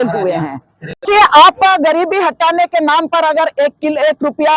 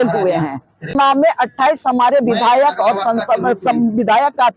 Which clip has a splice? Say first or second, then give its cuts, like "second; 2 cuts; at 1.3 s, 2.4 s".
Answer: second; 1 cut; at 0.9 s